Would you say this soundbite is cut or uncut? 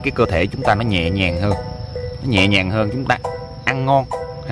uncut